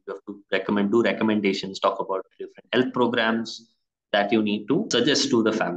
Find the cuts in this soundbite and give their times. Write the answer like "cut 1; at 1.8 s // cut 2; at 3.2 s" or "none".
cut 1; at 4.9 s